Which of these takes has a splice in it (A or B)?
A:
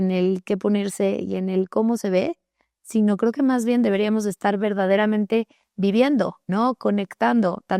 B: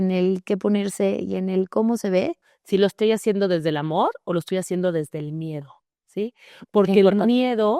B